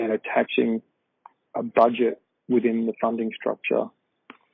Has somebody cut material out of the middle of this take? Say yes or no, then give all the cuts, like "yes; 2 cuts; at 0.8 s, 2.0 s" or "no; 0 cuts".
no; 0 cuts